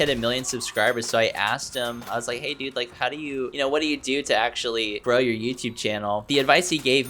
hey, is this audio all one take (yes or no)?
yes